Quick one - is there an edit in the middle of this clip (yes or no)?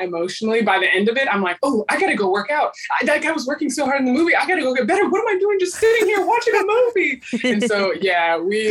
no